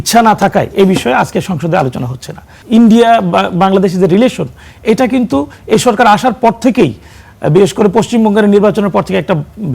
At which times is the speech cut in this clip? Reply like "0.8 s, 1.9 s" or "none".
2.5 s